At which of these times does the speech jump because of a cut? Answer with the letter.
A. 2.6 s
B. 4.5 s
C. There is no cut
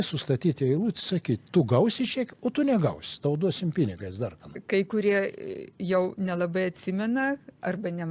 B